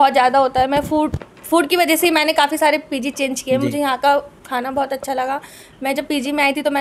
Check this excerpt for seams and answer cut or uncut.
uncut